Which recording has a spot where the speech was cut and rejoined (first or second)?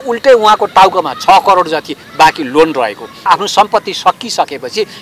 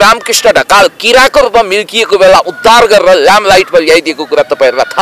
first